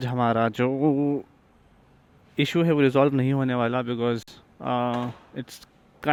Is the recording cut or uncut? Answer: uncut